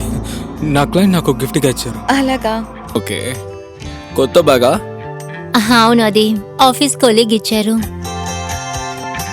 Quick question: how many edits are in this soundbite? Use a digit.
1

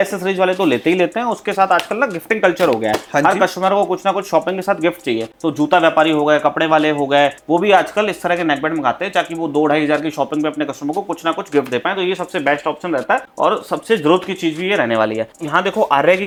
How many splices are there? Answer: 0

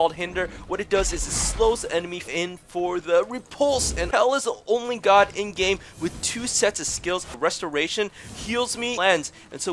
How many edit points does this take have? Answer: 4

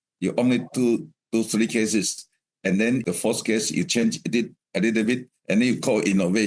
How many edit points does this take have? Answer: 1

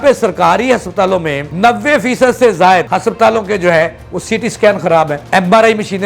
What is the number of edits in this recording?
3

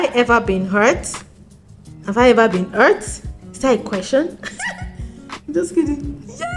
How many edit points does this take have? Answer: 0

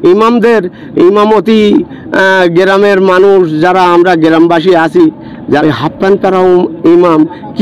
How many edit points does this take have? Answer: 1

